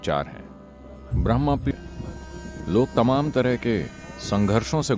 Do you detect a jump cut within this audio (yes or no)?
yes